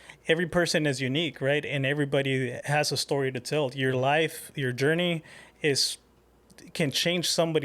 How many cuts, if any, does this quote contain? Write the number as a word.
one